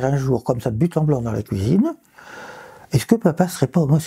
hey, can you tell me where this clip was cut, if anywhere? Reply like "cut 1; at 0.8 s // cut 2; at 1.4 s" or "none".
none